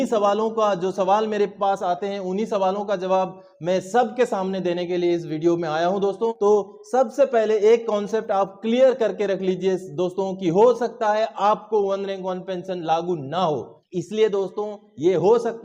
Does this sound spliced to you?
yes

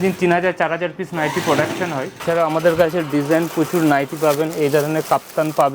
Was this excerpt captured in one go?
no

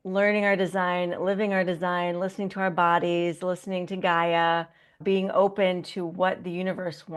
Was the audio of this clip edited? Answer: no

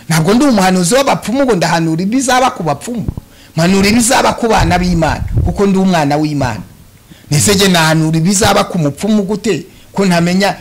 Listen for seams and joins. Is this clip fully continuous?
yes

